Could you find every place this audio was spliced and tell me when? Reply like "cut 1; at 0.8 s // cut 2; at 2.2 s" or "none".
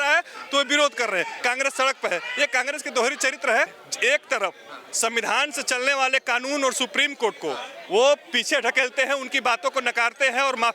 cut 1; at 3.8 s

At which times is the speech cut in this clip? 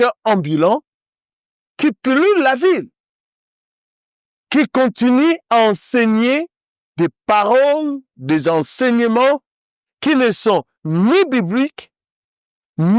none

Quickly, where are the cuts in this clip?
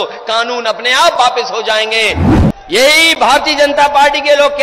cut 1; at 2.3 s

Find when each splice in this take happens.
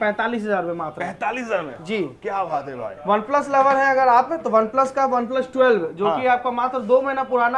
none

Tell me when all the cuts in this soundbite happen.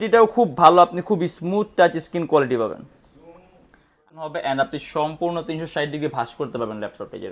cut 1; at 4.0 s

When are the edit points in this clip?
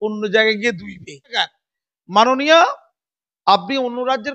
cut 1; at 1.3 s

